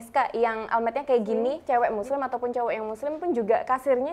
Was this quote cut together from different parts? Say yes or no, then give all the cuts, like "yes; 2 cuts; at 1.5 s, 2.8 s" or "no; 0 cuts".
yes; 1 cut; at 1.6 s